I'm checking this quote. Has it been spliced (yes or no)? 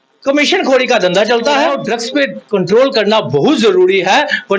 yes